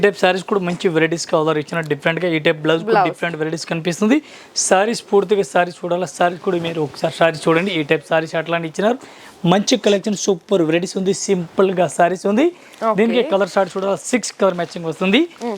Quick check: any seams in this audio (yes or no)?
no